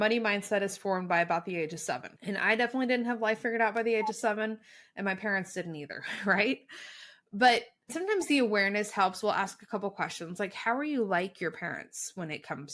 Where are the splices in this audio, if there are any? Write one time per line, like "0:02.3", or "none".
0:02.1